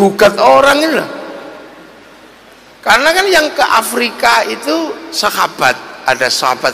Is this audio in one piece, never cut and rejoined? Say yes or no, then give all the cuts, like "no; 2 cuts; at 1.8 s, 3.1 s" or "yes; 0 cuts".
yes; 0 cuts